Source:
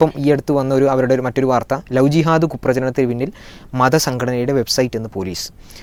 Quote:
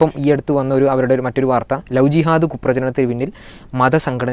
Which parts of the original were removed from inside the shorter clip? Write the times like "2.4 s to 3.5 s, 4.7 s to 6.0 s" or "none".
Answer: none